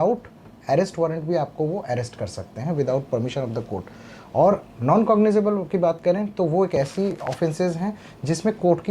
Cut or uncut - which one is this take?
uncut